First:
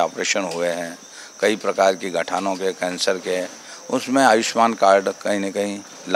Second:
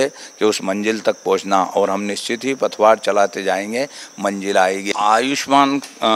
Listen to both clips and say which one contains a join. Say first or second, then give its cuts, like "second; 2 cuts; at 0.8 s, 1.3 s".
second; 1 cut; at 4.8 s